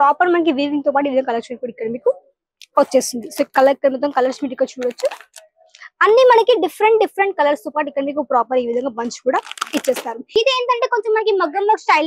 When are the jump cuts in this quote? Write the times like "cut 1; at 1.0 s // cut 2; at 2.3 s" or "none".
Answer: cut 1; at 10.2 s